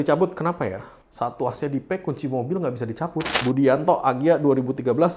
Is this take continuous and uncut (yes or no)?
no